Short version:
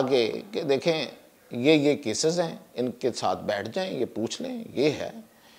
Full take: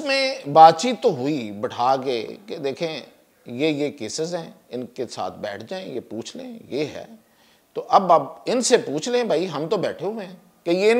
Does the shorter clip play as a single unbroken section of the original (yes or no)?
yes